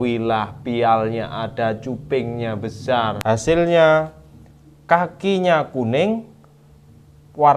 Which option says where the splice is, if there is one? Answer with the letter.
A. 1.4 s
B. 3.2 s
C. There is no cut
B